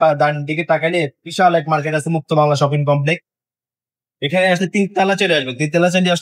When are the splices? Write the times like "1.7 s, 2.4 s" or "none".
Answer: none

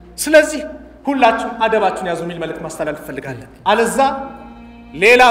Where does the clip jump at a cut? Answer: 3.5 s

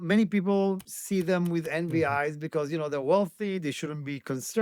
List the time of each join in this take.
0.9 s

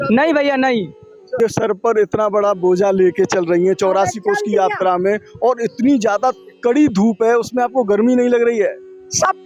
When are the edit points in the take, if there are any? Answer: 1.4 s

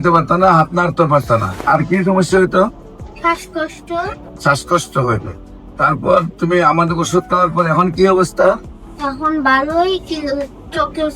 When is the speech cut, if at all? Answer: 1.6 s, 4.3 s

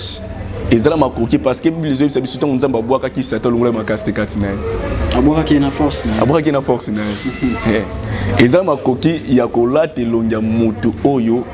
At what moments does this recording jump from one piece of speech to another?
none

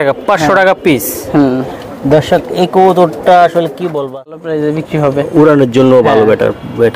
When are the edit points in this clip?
4.4 s

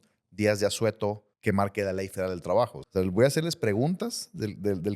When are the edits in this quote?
1.3 s, 2.8 s

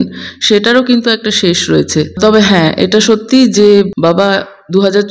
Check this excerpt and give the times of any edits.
2.2 s, 3.9 s

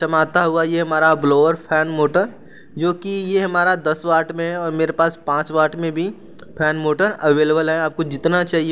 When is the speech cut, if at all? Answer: none

